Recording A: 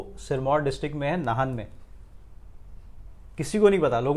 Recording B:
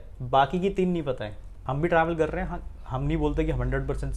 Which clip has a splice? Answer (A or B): B